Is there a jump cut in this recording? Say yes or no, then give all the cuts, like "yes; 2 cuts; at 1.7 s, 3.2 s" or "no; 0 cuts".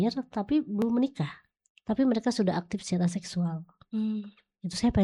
no; 0 cuts